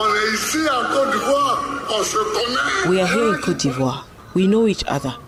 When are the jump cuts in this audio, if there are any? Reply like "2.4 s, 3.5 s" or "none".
none